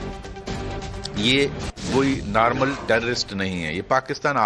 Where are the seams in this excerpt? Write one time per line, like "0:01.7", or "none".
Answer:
0:01.7